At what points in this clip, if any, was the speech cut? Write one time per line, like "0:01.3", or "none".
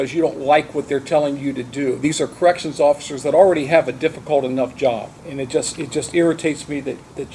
none

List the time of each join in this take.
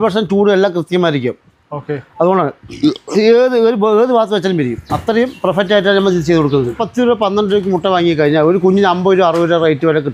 none

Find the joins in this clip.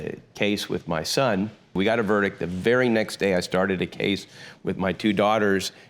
0:01.8

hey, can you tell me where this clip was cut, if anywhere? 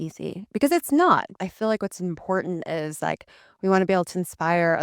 0:01.3

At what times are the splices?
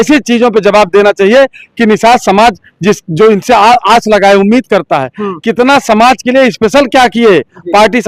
none

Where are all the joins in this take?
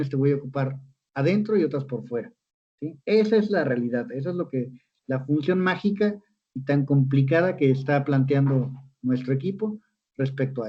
none

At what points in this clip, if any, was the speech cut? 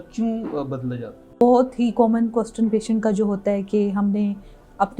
0:01.4

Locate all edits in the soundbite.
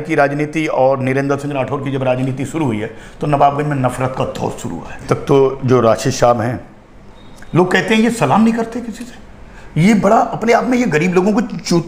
0:05.0

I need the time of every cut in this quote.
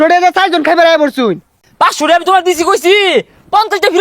0:01.6

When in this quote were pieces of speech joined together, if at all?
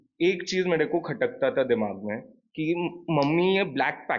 none

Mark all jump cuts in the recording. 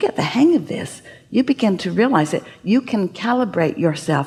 none

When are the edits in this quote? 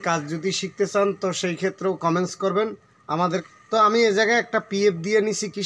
0:03.4

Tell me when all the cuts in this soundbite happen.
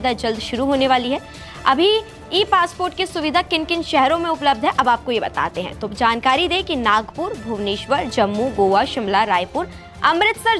none

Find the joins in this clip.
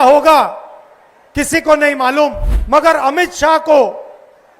0:02.5

